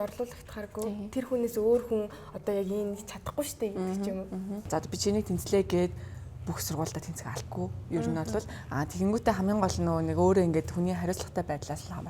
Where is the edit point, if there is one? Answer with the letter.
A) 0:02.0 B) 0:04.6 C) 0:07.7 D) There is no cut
B